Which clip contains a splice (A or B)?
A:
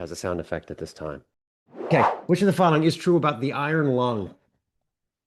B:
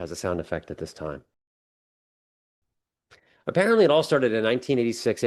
A